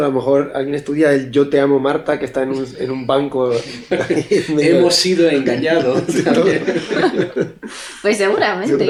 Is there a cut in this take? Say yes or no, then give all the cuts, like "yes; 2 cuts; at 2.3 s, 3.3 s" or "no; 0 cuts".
no; 0 cuts